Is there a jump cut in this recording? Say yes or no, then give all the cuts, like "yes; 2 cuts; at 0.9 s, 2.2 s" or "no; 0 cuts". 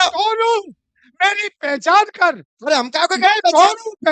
no; 0 cuts